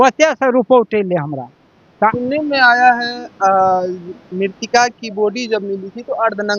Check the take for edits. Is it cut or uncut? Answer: cut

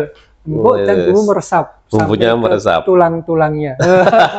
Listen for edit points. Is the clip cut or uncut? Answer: uncut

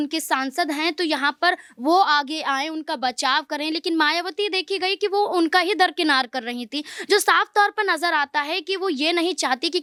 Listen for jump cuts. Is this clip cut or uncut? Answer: uncut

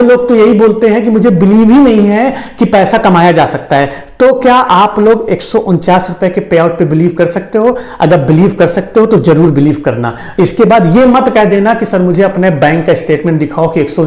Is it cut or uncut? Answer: uncut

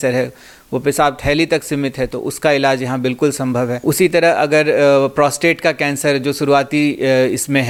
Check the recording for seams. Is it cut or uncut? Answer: uncut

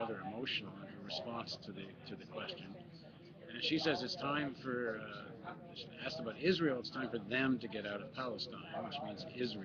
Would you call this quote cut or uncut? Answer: cut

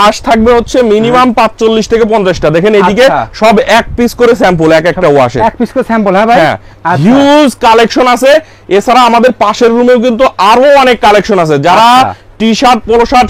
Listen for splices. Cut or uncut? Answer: uncut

